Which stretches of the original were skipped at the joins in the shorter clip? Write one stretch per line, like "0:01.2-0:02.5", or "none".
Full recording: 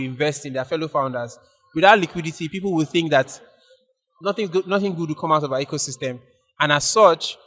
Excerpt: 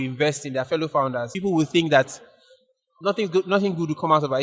0:01.3-0:02.5